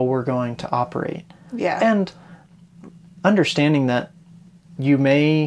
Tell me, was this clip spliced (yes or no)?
no